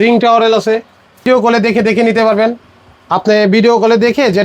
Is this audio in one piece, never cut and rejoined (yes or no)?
no